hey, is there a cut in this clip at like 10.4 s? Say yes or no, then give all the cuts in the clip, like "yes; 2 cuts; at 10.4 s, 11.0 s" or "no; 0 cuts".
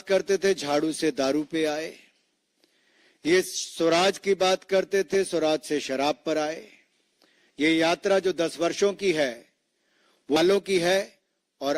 yes; 1 cut; at 10.4 s